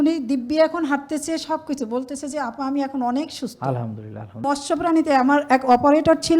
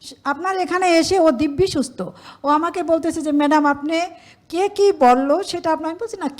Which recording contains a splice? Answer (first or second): first